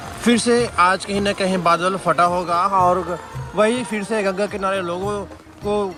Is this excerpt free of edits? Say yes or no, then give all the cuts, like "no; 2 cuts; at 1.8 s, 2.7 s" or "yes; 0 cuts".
yes; 0 cuts